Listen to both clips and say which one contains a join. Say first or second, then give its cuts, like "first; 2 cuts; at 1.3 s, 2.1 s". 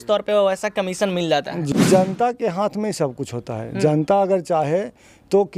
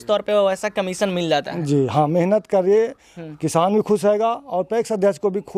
first; 1 cut; at 1.7 s